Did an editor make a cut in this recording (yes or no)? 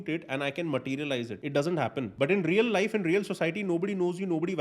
yes